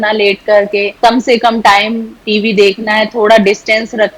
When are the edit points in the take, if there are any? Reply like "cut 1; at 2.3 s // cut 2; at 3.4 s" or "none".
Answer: cut 1; at 1.0 s